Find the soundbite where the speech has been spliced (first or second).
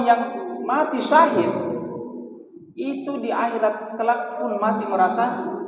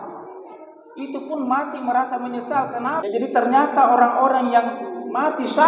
second